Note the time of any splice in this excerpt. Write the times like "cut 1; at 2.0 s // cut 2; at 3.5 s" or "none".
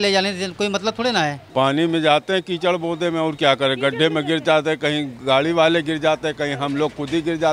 cut 1; at 1.4 s